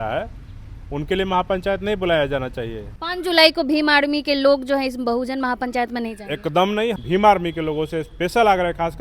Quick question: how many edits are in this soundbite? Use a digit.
2